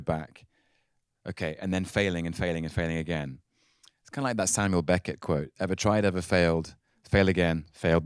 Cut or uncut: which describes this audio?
uncut